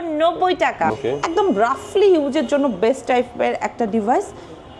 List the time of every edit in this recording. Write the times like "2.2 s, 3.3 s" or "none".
0.9 s